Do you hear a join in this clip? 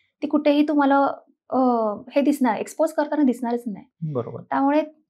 no; 0 cuts

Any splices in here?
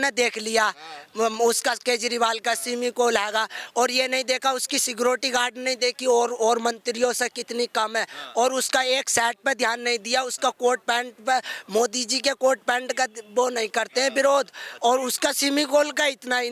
no; 0 cuts

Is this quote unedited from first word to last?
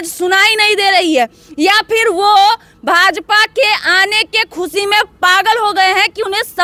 yes; 0 cuts

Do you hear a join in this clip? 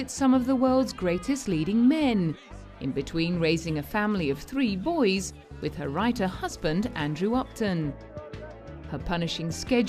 yes; 1 cut; at 4.8 s

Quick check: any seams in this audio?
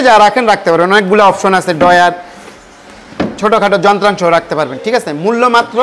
no; 0 cuts

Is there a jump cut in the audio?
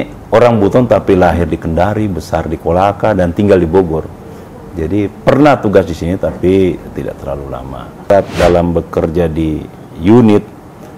yes; 1 cut; at 8.1 s

